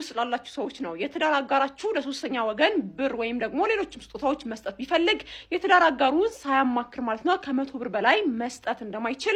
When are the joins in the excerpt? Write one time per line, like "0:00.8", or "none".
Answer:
none

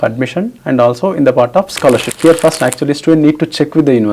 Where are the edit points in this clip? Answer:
0:02.1

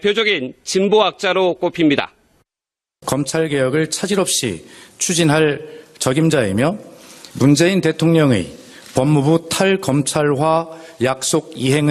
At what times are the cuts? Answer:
0:04.5

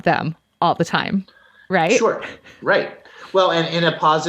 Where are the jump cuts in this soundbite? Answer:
0:02.0

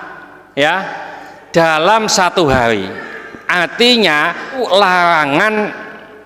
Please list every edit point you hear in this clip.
0:04.7

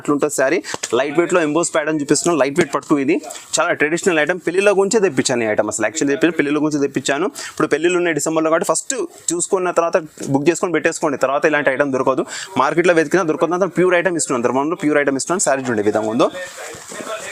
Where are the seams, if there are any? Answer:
none

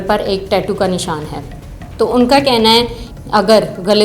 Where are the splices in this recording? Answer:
0:03.0

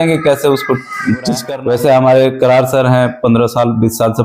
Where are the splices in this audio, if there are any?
0:01.4

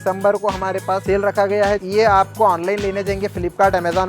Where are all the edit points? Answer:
0:01.0
0:01.8

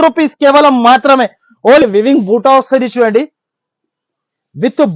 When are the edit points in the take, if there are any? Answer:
0:01.8

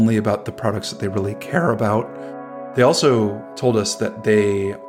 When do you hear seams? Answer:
0:02.2
0:03.4

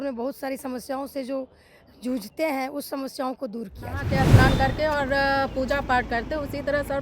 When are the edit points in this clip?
0:04.1

